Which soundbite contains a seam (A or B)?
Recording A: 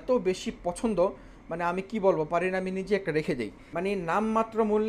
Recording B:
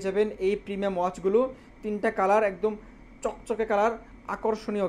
A